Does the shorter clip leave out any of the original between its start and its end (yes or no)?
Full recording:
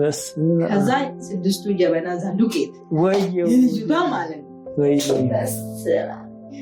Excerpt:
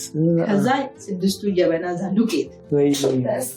yes